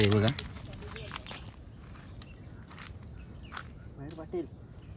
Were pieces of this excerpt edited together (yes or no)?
yes